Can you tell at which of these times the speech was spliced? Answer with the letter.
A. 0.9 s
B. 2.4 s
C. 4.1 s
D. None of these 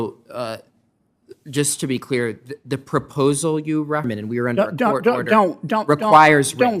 C